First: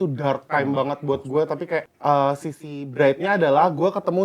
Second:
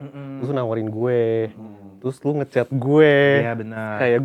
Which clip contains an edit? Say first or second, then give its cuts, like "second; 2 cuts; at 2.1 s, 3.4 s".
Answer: first; 1 cut; at 1.9 s